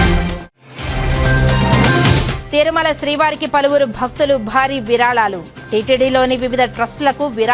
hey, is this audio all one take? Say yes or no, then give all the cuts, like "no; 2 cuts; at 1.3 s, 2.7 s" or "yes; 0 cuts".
no; 1 cut; at 2.4 s